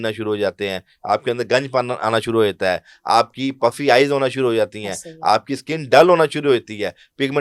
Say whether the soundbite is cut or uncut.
uncut